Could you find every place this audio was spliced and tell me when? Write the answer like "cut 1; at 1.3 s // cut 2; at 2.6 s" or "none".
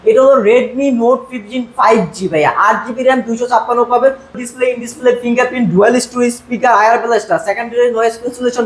cut 1; at 4.4 s